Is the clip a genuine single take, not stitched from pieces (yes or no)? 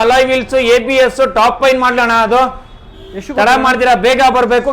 yes